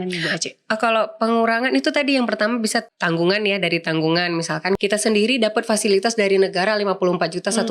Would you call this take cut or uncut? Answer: cut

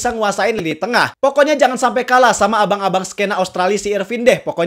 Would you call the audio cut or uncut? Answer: uncut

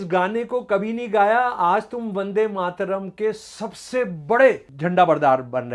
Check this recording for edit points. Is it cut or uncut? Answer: cut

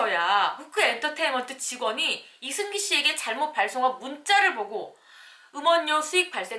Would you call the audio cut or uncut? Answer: uncut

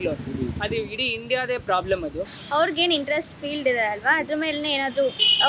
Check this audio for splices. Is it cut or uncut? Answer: cut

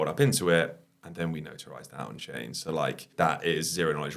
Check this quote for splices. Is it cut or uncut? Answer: cut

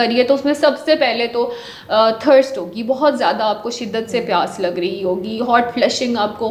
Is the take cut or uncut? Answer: uncut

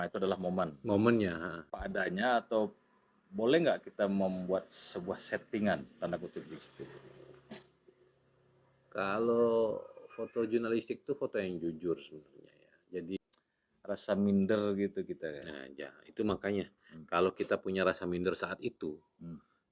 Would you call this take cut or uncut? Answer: cut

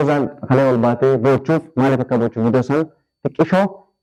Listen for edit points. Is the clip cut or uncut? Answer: uncut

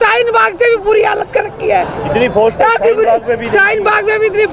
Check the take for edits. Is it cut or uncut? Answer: uncut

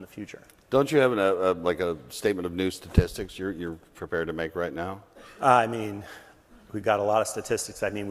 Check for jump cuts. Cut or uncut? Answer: cut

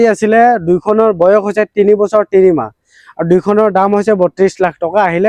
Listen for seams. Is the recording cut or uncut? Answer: uncut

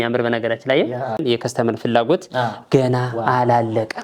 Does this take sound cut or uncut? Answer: cut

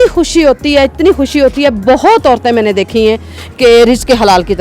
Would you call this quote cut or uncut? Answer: uncut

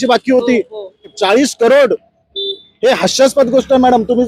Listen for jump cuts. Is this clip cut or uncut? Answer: cut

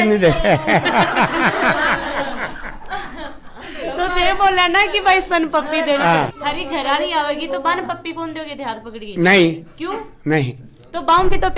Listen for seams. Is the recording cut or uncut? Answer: uncut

